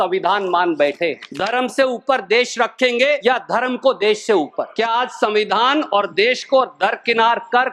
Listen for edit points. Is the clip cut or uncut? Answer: cut